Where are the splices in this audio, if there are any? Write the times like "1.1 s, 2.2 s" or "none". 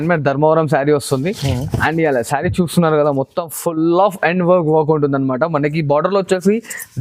none